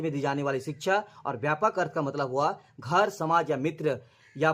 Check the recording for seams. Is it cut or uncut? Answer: uncut